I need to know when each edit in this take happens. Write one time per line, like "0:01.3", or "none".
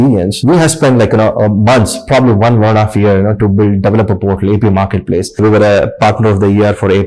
0:05.4